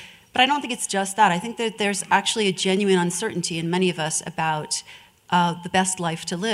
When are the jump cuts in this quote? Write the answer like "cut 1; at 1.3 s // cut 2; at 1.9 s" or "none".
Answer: none